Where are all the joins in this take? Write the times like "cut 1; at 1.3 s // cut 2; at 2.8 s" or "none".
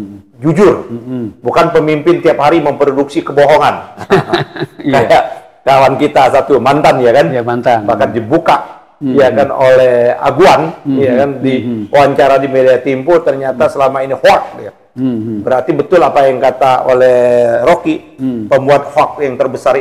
none